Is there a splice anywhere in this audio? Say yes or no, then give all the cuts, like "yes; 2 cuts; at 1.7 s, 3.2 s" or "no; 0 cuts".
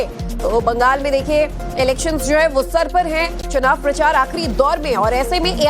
yes; 1 cut; at 2.9 s